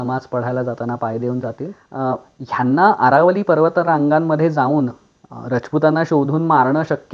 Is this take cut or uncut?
cut